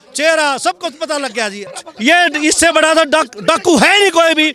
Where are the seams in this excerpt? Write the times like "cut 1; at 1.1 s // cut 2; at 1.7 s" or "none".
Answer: cut 1; at 1.7 s